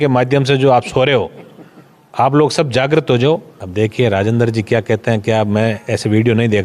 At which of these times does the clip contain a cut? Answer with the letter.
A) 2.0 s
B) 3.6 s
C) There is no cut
B